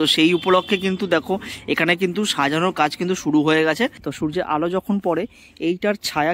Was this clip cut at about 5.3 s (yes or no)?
no